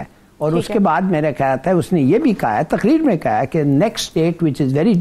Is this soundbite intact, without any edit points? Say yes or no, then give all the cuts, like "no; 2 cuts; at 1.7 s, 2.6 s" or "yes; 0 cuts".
yes; 0 cuts